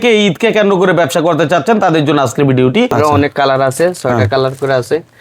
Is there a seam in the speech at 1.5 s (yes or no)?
no